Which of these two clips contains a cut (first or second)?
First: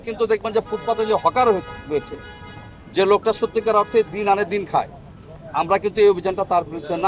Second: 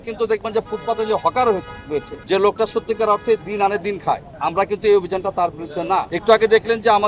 second